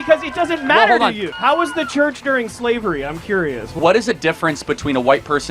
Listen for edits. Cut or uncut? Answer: cut